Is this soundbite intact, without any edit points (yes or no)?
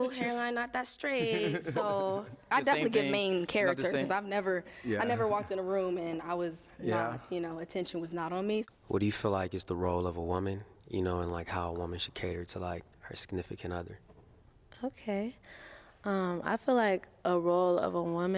no